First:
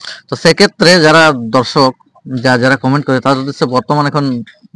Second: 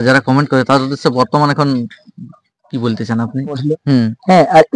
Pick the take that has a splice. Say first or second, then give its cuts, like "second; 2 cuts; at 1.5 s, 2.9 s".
second; 1 cut; at 3.7 s